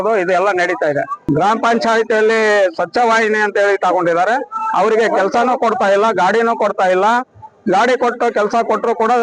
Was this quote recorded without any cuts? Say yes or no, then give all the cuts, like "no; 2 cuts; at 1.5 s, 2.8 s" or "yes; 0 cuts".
no; 1 cut; at 1.2 s